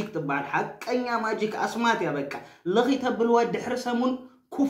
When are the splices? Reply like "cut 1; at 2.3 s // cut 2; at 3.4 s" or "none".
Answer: none